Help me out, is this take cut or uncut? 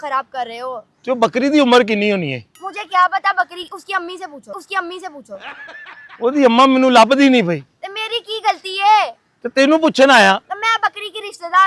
uncut